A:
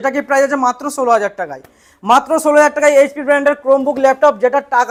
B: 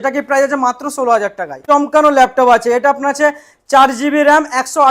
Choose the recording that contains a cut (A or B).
B